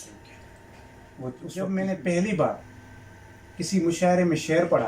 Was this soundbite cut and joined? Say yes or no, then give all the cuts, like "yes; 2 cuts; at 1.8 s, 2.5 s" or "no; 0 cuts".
yes; 1 cut; at 1.5 s